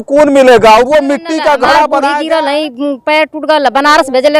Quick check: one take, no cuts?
no; 1 cut; at 2.1 s

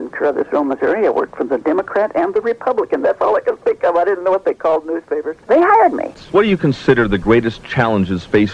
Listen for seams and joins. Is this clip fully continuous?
no; 1 cut; at 6.1 s

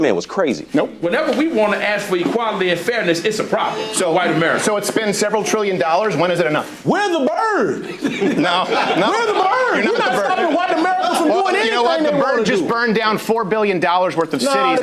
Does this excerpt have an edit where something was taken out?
yes; 2 cuts; at 1.5 s, 8.3 s

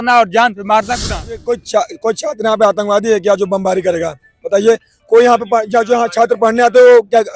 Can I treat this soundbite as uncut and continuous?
no; 1 cut; at 1.3 s

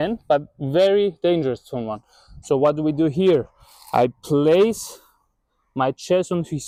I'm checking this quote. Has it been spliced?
no; 0 cuts

